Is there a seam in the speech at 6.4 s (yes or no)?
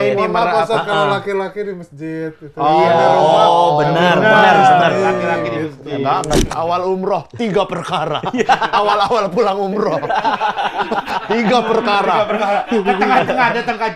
yes